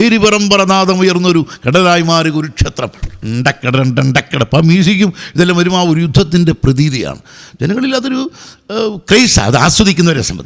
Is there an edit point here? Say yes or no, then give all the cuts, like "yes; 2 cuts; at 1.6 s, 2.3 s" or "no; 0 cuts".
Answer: no; 0 cuts